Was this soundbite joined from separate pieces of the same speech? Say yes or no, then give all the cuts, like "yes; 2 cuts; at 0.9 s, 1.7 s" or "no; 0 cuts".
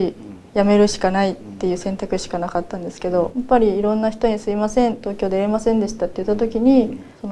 no; 0 cuts